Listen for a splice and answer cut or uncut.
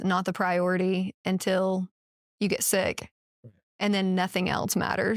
uncut